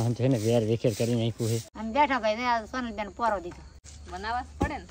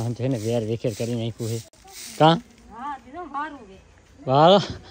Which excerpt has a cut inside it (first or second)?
first